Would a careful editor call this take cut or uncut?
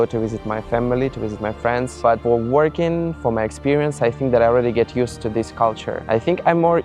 cut